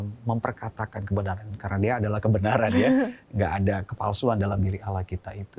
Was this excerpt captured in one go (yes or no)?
yes